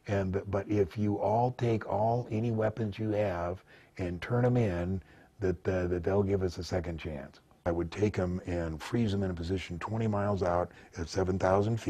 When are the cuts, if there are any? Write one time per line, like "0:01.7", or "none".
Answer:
0:07.5